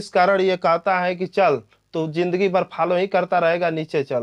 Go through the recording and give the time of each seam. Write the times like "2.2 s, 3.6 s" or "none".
none